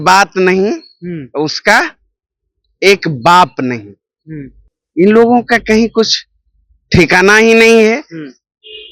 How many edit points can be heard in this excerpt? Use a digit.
0